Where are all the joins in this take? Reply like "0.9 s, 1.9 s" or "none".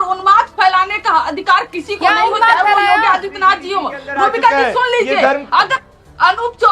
none